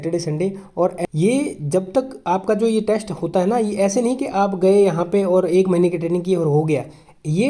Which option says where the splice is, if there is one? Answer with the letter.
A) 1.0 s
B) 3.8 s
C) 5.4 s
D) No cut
A